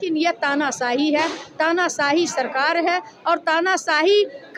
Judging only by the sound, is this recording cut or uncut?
uncut